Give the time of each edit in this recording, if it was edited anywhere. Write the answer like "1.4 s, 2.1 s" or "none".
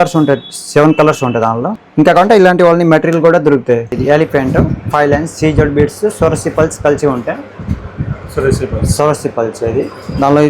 1.8 s, 3.9 s